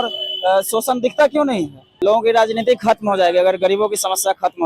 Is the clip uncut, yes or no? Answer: no